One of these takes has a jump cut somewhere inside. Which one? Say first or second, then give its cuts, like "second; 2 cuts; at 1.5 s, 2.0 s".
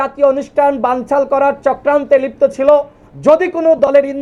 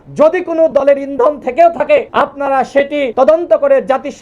second; 2 cuts; at 2.1 s, 3.1 s